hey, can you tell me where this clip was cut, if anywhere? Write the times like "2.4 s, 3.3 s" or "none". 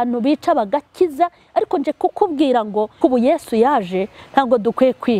3.0 s